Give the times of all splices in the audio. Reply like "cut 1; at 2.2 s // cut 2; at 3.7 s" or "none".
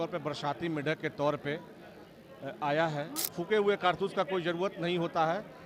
cut 1; at 3.2 s